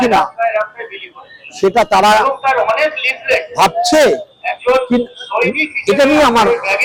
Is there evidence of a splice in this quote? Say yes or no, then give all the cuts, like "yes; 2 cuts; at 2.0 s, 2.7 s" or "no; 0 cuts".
no; 0 cuts